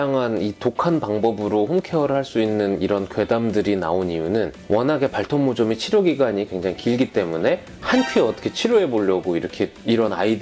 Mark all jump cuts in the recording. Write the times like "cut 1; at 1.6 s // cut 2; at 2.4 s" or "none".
none